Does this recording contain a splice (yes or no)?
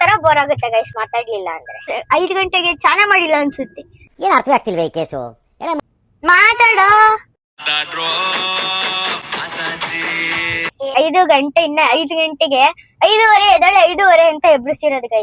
yes